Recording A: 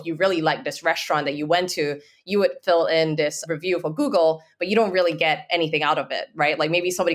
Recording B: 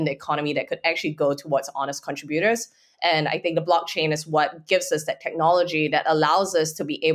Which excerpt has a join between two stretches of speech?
A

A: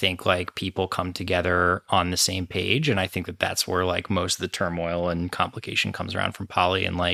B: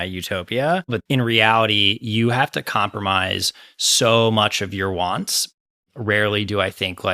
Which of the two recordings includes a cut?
B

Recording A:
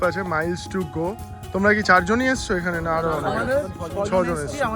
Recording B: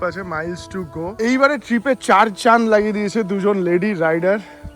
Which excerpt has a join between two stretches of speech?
B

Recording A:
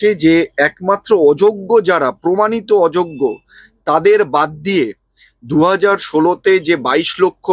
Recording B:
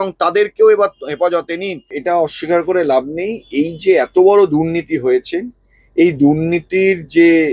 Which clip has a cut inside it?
B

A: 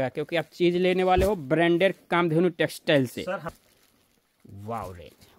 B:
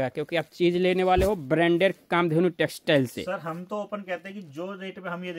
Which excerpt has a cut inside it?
A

